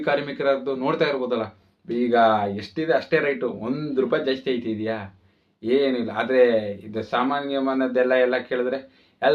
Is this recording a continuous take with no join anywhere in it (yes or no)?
yes